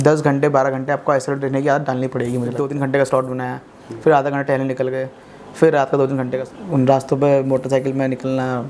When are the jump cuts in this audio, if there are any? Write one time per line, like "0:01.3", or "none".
0:02.6
0:06.3